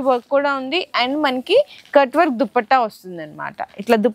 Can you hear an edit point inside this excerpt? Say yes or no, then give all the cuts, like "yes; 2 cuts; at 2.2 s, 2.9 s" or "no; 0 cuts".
no; 0 cuts